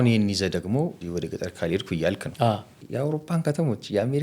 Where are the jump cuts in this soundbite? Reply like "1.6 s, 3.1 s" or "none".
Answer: 1.0 s, 2.6 s